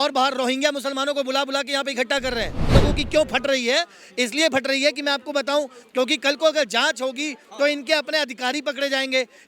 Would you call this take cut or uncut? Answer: cut